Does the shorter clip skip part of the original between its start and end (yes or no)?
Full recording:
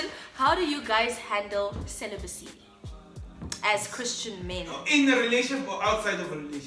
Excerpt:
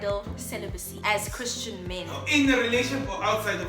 yes